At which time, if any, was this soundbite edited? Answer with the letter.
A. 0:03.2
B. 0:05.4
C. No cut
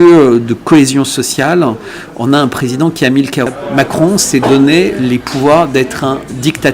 A